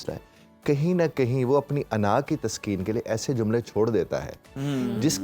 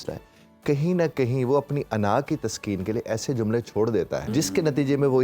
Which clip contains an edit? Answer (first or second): second